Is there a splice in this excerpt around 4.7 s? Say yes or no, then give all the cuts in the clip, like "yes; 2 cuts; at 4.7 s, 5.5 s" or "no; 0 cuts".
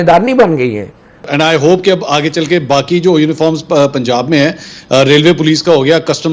no; 1 cut; at 1.3 s